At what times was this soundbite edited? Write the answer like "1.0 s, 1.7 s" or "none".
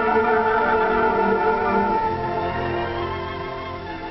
none